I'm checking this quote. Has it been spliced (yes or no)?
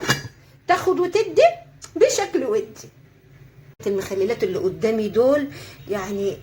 yes